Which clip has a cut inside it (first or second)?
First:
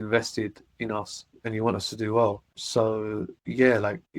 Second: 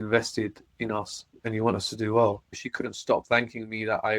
second